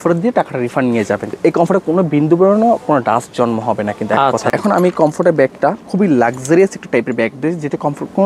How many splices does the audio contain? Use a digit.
2